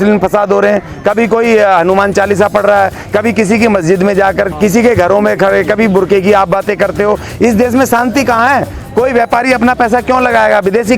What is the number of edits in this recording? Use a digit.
1